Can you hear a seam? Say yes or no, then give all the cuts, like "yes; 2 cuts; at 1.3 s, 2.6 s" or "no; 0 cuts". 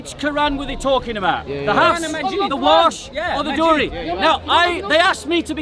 no; 0 cuts